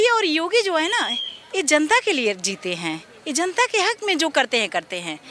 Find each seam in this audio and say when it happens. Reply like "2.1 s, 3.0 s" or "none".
none

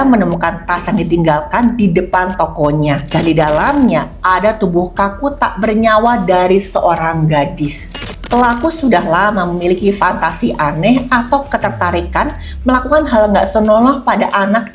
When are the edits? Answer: 3.0 s, 8.0 s

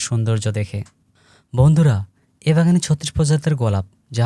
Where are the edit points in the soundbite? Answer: 0.9 s

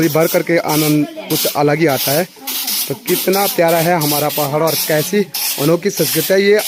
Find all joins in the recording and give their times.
none

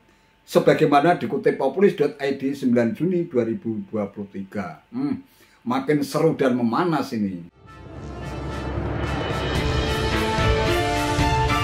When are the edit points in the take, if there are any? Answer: none

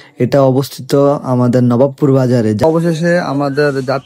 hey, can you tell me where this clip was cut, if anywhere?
2.6 s

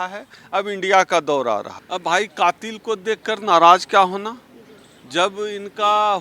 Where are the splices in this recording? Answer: 1.8 s

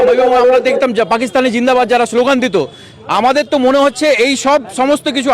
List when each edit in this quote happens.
none

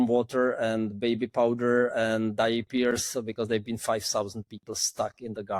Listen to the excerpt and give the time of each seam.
none

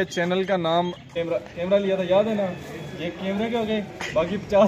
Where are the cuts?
1.1 s

